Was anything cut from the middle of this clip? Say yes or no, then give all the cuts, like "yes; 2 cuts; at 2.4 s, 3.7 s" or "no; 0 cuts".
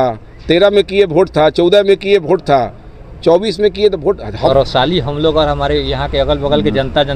yes; 1 cut; at 4.5 s